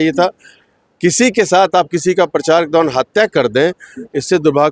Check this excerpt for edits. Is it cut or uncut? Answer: uncut